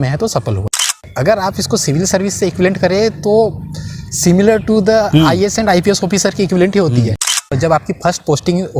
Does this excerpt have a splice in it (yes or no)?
yes